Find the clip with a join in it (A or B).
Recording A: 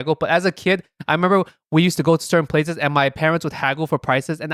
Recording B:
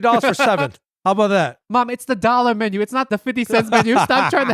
B